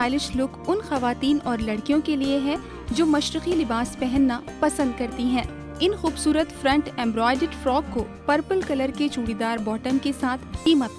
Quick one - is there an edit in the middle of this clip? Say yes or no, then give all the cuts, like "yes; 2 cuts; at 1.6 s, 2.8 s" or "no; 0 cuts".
no; 0 cuts